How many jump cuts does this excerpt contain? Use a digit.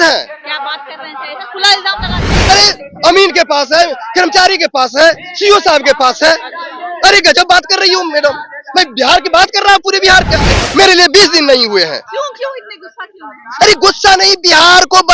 2